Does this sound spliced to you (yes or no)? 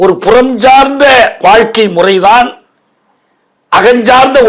no